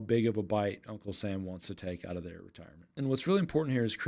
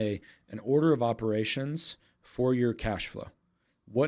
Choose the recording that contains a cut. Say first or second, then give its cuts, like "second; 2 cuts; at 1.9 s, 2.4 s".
first; 1 cut; at 2.9 s